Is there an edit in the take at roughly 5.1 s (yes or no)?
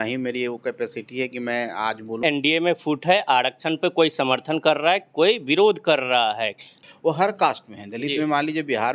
no